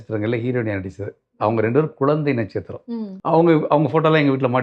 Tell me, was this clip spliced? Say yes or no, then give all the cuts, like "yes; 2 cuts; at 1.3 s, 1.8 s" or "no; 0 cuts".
yes; 1 cut; at 3.1 s